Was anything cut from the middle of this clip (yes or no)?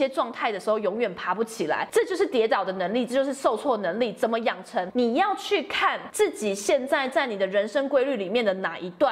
yes